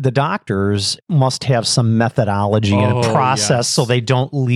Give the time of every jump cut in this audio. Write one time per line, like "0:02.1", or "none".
0:01.0